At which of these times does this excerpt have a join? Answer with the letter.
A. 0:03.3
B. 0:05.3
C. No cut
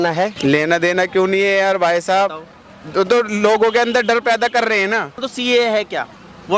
B